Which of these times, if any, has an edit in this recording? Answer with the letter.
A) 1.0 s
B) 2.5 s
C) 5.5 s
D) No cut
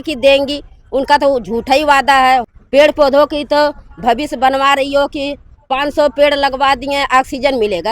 B